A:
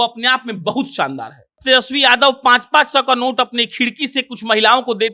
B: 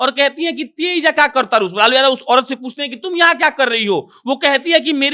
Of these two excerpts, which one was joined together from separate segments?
A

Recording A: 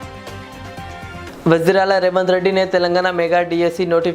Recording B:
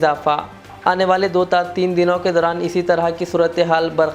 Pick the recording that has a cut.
A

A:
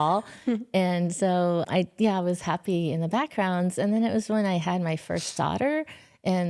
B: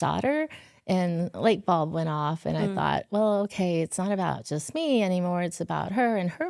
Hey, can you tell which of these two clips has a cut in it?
A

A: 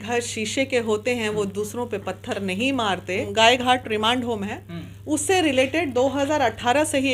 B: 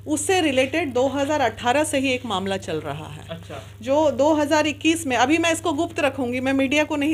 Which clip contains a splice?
A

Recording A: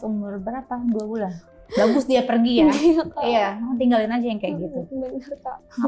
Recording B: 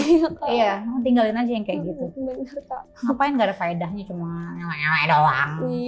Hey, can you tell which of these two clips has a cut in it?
A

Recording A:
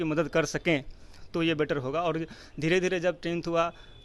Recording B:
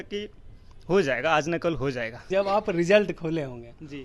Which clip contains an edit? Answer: B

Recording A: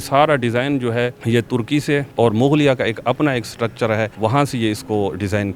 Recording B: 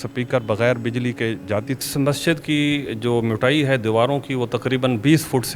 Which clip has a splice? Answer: B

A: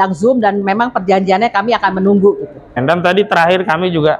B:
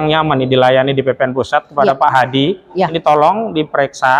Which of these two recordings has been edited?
A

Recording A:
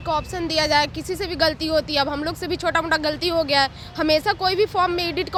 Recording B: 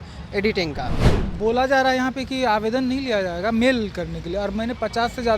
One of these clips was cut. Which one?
B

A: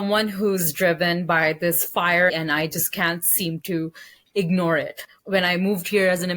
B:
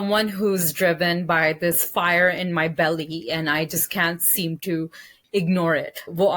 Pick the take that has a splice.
A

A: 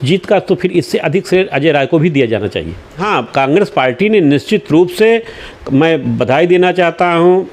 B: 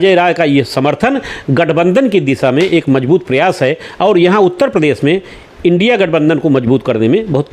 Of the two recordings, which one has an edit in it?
A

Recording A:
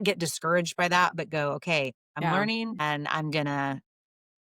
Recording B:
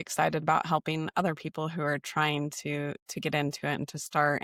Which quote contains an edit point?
A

